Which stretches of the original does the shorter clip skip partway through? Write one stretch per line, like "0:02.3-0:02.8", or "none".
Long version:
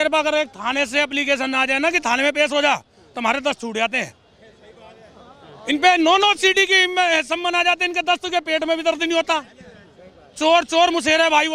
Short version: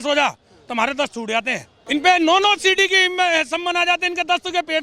0:04.2-0:05.5